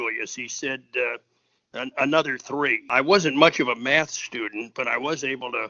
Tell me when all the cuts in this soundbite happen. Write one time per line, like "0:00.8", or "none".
0:02.8